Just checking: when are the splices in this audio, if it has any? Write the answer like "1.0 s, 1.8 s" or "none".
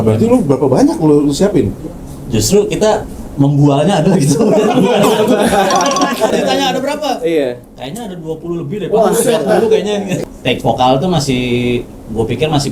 6.3 s, 10.2 s